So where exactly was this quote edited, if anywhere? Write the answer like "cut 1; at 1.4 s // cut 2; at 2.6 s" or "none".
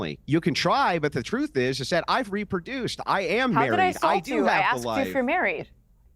none